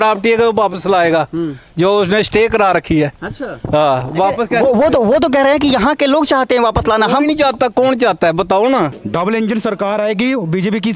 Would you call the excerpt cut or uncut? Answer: cut